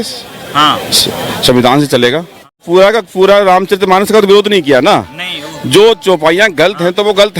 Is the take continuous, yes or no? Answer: no